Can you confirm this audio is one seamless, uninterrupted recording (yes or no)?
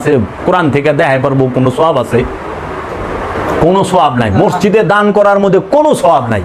yes